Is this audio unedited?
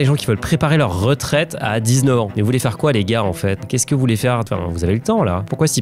yes; 0 cuts

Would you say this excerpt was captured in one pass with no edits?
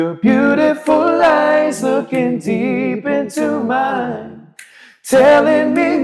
yes; 0 cuts

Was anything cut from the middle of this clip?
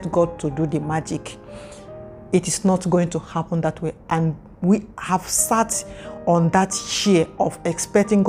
no; 0 cuts

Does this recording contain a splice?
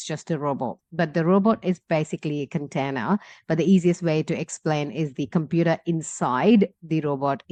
no; 0 cuts

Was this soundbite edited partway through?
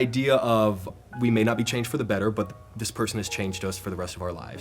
yes; 1 cut; at 0.9 s

